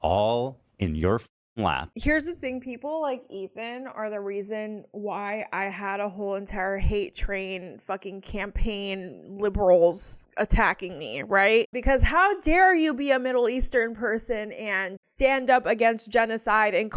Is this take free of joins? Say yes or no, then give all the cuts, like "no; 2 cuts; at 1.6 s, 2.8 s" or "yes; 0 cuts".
yes; 0 cuts